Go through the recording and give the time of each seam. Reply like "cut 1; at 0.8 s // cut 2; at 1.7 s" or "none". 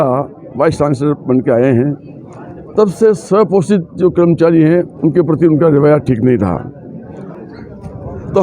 cut 1; at 7.3 s